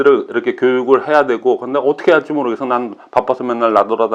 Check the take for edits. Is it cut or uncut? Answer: uncut